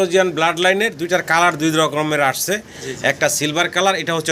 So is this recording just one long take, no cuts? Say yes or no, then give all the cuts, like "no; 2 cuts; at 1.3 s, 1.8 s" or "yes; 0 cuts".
yes; 0 cuts